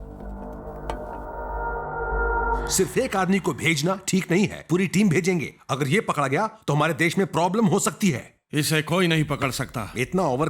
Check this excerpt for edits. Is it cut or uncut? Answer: cut